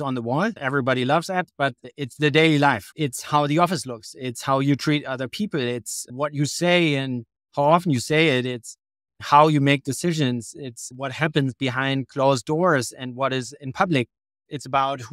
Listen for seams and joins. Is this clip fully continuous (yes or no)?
yes